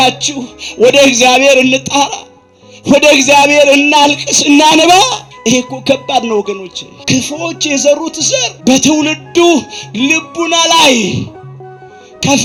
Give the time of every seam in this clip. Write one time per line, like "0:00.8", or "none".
none

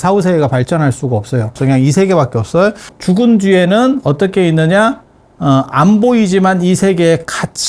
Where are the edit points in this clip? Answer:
0:01.6
0:02.9

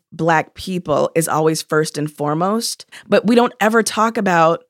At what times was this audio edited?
0:02.9

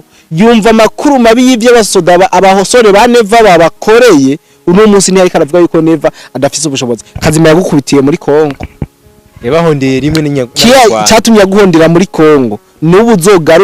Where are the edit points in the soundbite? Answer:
none

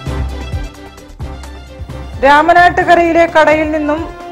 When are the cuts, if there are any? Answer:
0:01.3

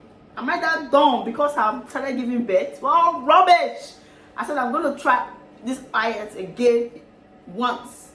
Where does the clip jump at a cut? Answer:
none

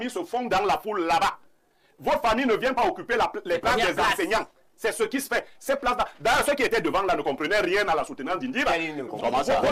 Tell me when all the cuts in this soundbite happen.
none

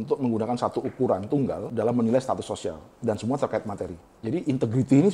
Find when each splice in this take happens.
0:01.7
0:02.9
0:04.0

